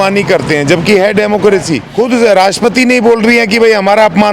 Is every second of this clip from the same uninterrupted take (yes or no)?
no